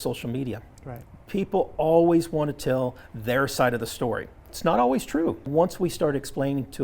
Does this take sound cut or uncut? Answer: cut